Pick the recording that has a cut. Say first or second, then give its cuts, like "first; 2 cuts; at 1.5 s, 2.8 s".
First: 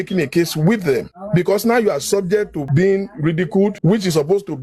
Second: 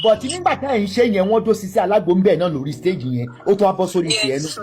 first; 3 cuts; at 1.1 s, 2.6 s, 3.8 s